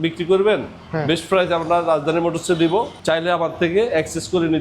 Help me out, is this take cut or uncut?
cut